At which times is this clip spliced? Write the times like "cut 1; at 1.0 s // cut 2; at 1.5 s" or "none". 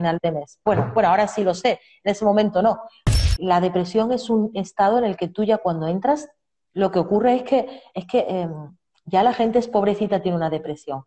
cut 1; at 2.9 s